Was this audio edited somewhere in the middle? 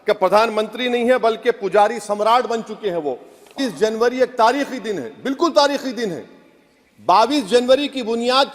yes; 1 cut; at 3.5 s

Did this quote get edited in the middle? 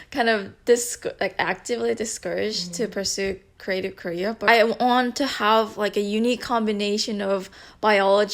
yes; 1 cut; at 4.4 s

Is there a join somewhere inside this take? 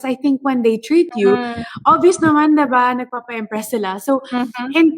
no; 0 cuts

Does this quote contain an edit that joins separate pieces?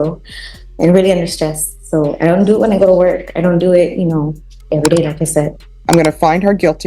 yes; 1 cut; at 5.6 s

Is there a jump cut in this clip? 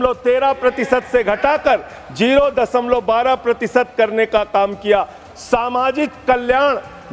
no; 0 cuts

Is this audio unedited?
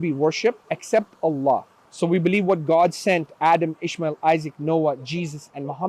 no; 1 cut; at 1.8 s

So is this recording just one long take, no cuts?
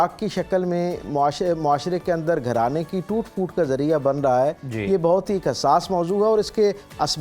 yes; 0 cuts

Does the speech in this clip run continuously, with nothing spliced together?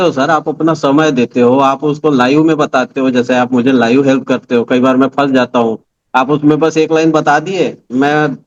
yes; 0 cuts

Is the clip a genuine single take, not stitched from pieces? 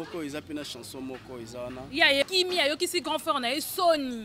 no; 1 cut; at 2.2 s

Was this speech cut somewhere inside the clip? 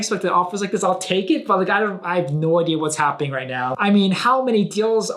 yes; 1 cut; at 3.7 s

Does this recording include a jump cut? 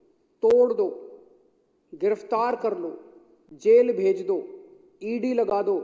no; 0 cuts

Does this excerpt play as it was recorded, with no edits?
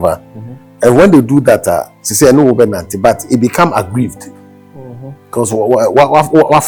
yes; 0 cuts

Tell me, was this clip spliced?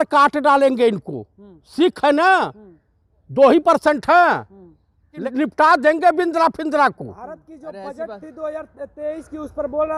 no; 0 cuts

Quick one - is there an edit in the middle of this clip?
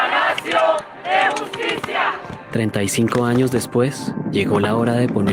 no; 0 cuts

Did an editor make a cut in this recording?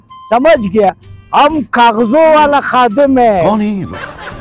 no; 0 cuts

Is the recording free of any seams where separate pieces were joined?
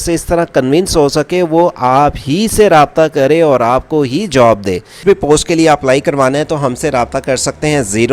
no; 1 cut; at 5.0 s

